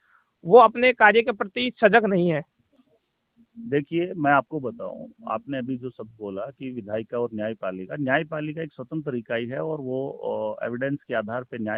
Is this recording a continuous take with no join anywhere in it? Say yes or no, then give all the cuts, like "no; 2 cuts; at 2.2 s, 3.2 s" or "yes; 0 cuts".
yes; 0 cuts